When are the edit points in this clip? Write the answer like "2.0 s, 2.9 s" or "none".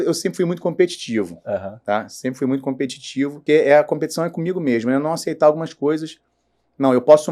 3.4 s